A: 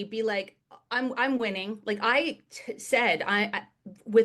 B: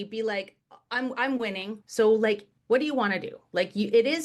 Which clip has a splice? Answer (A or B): B